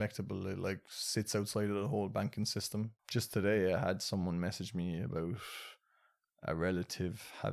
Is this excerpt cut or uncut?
cut